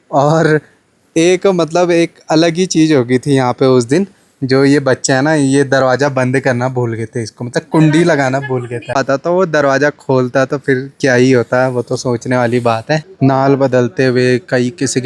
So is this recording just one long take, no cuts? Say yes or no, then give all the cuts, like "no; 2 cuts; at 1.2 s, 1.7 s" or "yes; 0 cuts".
no; 2 cuts; at 9.0 s, 13.1 s